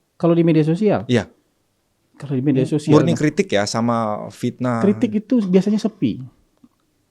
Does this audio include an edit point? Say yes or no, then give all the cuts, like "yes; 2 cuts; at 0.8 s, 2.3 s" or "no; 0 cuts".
no; 0 cuts